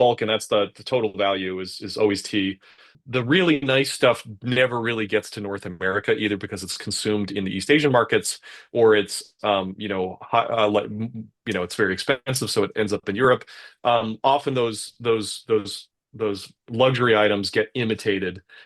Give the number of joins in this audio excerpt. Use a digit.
1